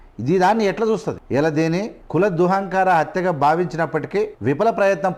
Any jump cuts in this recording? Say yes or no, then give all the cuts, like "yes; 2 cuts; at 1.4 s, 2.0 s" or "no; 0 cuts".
yes; 3 cuts; at 1.2 s, 2.0 s, 4.3 s